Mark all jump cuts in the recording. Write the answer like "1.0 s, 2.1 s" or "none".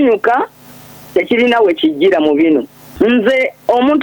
2.9 s